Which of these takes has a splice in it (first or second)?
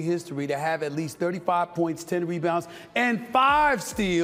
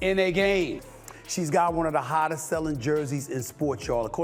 second